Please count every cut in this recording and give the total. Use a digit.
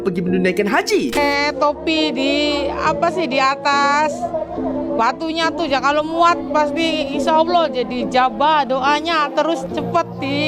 0